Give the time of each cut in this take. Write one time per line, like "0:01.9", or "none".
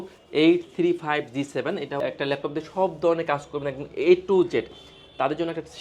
0:02.0